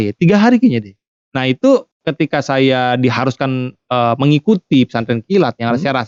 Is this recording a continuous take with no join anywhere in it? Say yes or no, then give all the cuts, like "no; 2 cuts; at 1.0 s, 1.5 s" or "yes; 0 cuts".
yes; 0 cuts